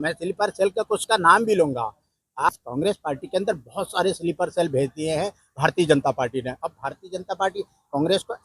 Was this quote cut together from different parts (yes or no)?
yes